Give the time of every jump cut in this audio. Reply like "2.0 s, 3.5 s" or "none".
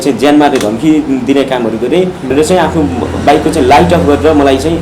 2.3 s